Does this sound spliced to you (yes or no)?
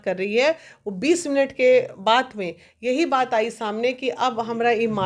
no